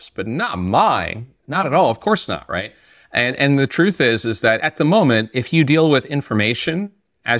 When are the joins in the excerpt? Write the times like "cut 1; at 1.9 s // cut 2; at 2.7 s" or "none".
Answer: cut 1; at 4.7 s

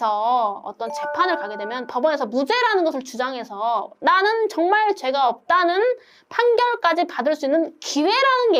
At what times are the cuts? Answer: none

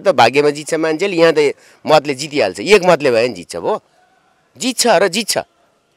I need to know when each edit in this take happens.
none

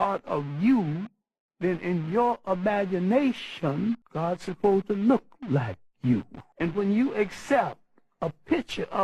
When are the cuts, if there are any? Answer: cut 1; at 4.1 s // cut 2; at 6.4 s

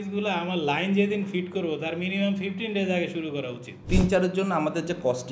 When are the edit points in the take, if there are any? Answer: cut 1; at 3.8 s

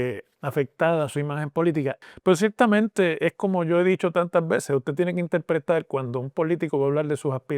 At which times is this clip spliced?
cut 1; at 2.0 s

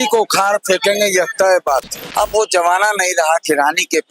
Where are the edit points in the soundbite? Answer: cut 1; at 2.0 s

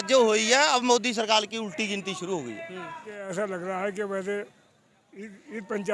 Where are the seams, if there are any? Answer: cut 1; at 3.3 s

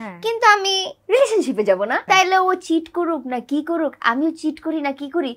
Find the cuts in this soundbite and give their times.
cut 1; at 2.0 s

